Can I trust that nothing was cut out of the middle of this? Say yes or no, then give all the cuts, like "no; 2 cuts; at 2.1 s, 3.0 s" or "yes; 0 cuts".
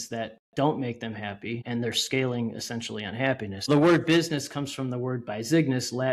no; 2 cuts; at 1.6 s, 3.7 s